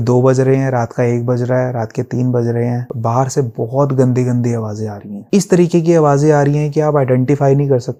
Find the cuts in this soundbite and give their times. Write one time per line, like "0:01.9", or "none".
none